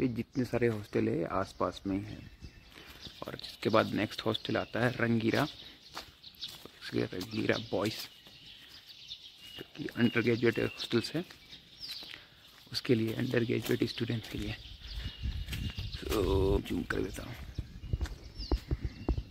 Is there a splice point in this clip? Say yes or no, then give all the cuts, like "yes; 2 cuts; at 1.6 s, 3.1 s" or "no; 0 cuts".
yes; 1 cut; at 16.6 s